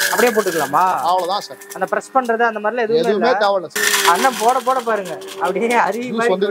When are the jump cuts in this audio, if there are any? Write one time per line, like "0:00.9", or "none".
0:03.7